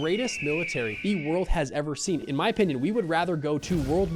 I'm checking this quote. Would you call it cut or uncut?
cut